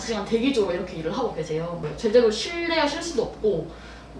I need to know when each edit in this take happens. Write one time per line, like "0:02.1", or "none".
0:01.8